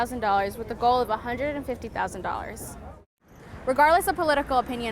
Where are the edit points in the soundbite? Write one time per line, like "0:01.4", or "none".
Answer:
0:03.1